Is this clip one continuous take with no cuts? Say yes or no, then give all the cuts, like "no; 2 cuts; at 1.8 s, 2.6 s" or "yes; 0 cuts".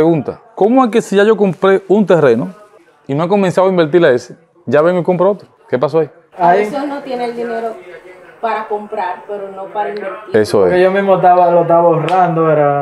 yes; 0 cuts